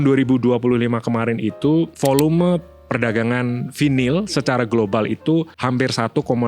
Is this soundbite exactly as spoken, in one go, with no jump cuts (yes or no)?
no